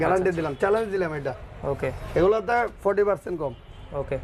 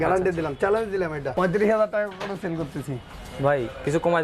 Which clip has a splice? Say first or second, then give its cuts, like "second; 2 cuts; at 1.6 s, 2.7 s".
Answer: second; 1 cut; at 1.2 s